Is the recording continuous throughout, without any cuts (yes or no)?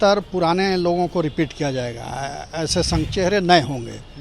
no